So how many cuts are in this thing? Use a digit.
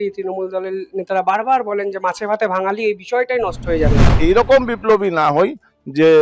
1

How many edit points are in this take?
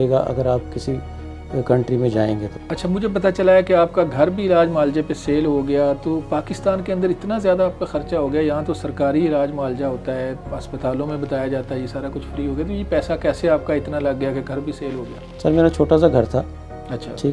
0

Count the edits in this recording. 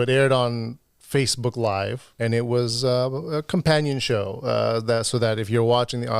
1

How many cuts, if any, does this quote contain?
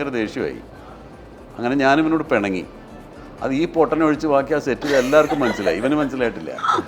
0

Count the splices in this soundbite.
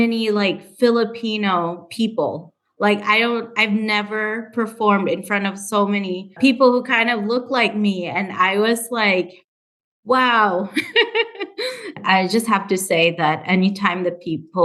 2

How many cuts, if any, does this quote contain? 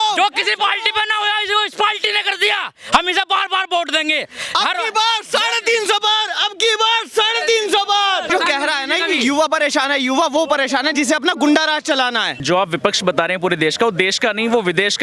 2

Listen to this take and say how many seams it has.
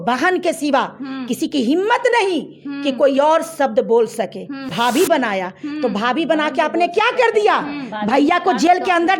1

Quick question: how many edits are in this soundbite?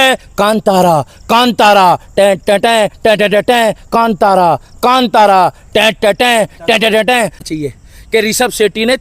1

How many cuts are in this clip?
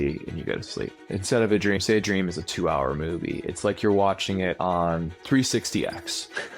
2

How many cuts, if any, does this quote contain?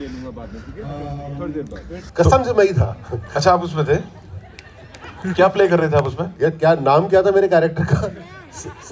2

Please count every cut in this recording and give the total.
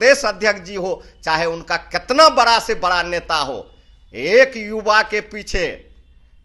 0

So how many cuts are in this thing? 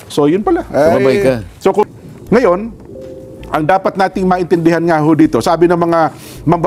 1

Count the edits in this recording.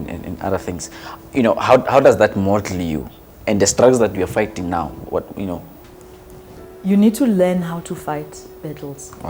1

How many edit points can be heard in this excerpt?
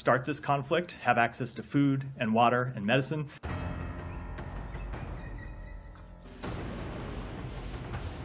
1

